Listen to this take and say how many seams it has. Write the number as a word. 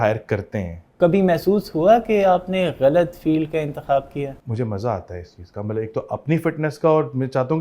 two